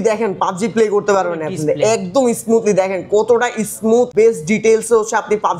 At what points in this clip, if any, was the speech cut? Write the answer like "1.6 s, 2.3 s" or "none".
4.1 s